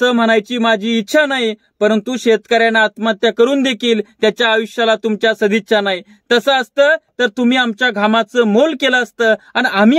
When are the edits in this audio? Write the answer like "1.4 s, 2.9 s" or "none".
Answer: none